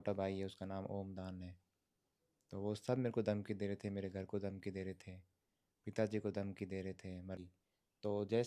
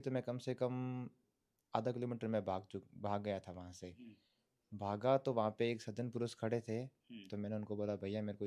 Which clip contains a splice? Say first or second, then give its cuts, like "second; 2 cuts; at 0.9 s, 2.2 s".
first; 1 cut; at 7.4 s